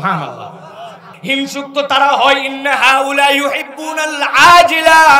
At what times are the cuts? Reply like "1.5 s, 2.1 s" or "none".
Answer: 1.1 s